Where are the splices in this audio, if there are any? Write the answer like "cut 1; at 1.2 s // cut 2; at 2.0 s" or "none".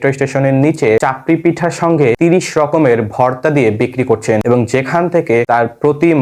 cut 1; at 1.0 s // cut 2; at 2.2 s // cut 3; at 4.4 s // cut 4; at 5.5 s